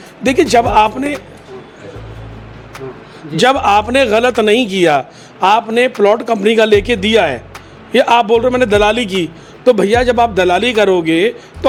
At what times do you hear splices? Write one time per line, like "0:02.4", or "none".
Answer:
none